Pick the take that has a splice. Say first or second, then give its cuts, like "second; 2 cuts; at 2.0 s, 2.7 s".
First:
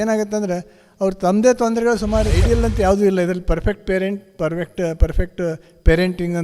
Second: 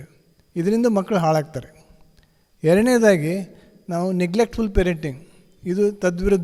first; 1 cut; at 2.4 s